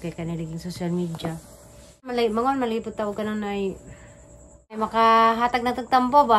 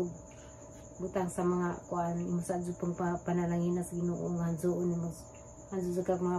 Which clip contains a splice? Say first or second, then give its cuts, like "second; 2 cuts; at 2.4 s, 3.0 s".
first; 2 cuts; at 2.1 s, 4.8 s